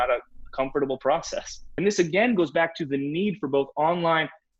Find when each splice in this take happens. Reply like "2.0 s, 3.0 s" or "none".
1.8 s